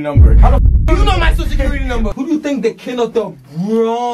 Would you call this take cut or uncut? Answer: cut